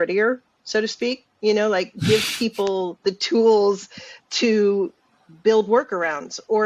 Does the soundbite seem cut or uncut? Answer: uncut